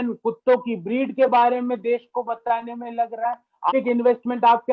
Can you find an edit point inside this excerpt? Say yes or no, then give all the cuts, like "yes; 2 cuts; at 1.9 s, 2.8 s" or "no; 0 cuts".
yes; 1 cut; at 3.7 s